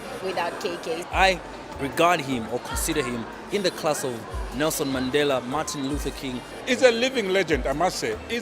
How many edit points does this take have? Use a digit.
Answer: 2